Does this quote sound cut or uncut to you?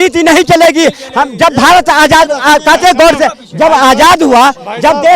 uncut